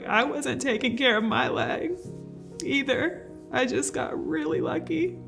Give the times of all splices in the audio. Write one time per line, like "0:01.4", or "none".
none